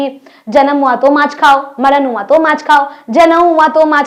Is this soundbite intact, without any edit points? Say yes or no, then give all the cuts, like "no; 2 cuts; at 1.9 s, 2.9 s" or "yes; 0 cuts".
yes; 0 cuts